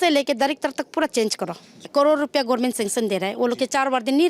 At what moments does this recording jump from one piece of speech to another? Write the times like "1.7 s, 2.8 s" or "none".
1.8 s